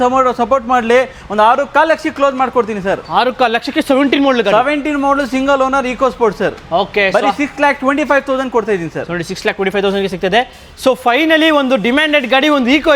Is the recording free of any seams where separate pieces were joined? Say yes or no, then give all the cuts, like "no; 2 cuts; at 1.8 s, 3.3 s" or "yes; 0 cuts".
yes; 0 cuts